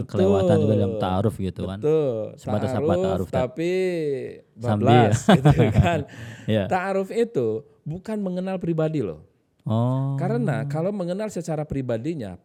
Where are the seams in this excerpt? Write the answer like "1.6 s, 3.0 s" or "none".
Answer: none